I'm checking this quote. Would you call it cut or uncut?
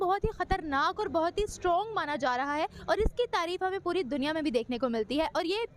uncut